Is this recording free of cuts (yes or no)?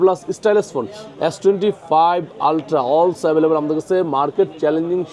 yes